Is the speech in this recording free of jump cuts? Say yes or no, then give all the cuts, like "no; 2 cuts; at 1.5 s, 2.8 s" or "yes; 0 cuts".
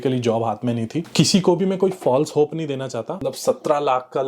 no; 2 cuts; at 1.1 s, 3.2 s